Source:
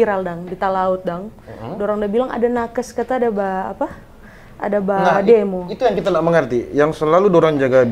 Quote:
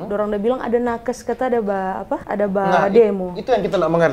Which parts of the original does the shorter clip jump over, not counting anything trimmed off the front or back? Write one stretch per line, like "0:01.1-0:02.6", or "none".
0:03.9-0:04.6